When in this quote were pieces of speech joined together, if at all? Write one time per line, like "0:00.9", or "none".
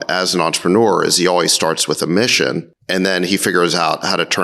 none